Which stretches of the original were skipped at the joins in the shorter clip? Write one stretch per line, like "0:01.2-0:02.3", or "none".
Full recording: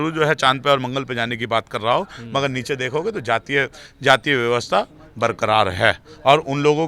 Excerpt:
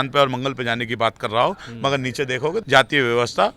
0:03.2-0:04.0